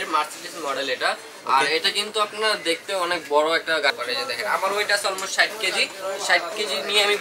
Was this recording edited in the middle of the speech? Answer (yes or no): yes